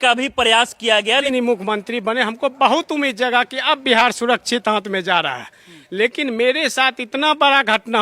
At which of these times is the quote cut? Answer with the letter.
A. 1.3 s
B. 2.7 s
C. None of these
A